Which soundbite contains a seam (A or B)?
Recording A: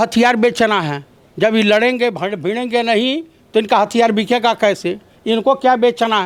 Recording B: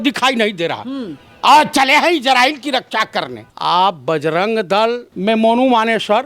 B